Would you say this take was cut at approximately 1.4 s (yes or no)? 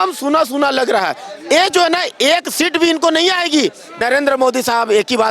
no